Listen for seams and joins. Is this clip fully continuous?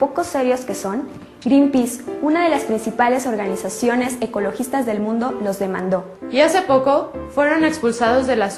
no; 1 cut; at 3.2 s

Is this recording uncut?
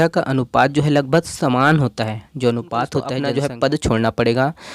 no; 1 cut; at 3.2 s

